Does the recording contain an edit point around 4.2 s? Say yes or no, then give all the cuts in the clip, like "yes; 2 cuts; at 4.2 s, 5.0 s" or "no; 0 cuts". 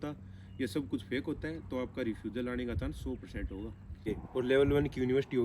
yes; 1 cut; at 4.2 s